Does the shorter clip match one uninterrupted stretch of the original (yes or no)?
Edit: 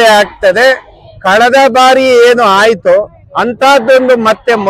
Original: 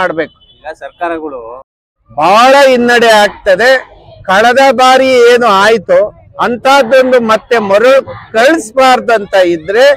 yes